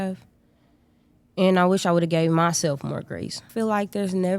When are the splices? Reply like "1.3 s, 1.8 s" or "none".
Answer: 3.5 s